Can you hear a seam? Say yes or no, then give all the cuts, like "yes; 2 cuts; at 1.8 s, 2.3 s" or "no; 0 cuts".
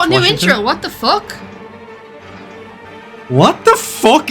yes; 1 cut; at 2.9 s